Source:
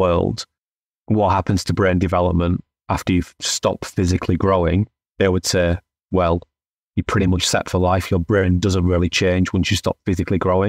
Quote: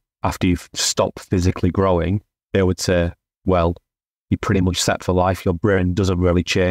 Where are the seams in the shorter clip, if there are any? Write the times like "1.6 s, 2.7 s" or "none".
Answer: none